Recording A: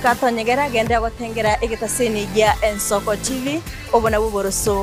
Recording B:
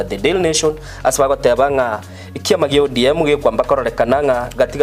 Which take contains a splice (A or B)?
B